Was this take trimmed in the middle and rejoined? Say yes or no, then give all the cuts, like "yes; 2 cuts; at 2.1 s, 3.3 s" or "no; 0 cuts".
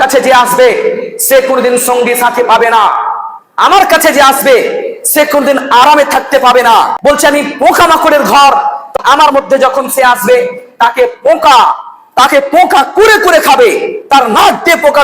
yes; 2 cuts; at 6.9 s, 8.9 s